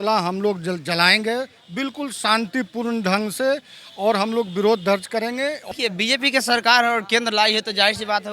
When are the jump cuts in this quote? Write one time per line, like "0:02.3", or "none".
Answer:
0:05.6